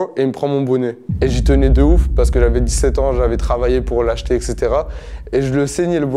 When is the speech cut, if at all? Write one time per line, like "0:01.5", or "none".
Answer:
none